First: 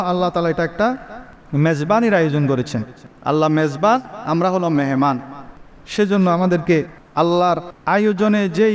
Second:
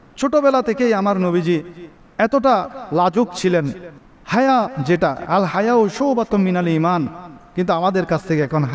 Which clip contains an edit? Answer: first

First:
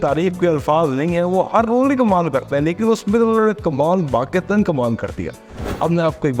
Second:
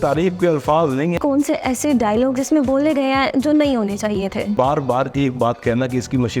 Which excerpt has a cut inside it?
second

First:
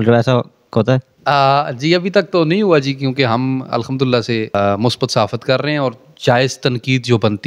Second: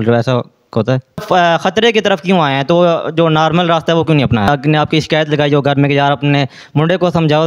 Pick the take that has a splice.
second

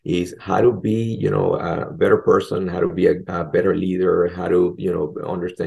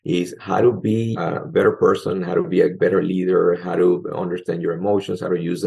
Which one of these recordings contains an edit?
second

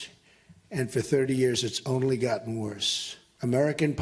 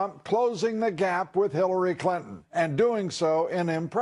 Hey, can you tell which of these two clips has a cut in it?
first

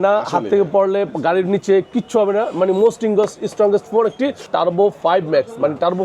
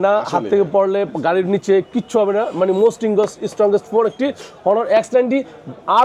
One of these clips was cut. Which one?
first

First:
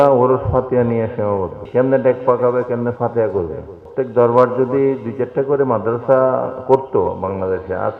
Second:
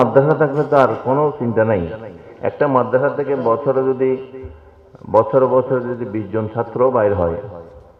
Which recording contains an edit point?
first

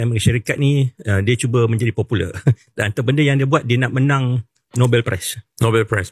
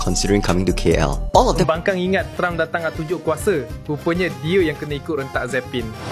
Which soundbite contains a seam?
second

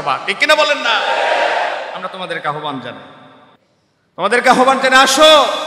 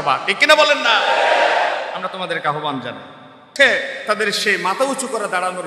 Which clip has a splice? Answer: second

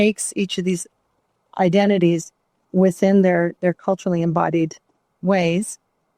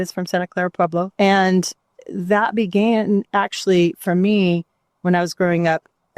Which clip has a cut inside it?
second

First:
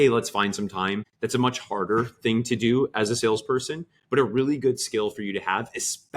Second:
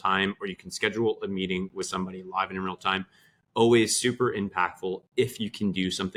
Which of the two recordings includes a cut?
first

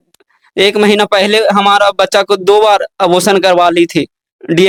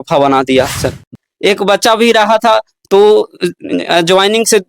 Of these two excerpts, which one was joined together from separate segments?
second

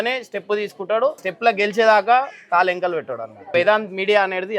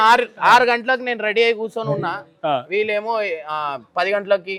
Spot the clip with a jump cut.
first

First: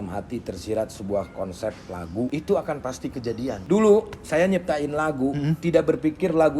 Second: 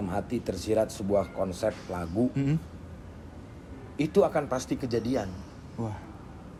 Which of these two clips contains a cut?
first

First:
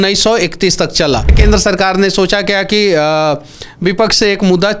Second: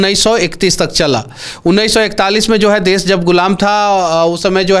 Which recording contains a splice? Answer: first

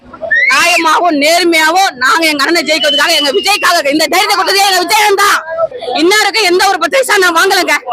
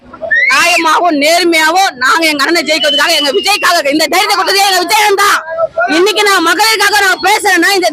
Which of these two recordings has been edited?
first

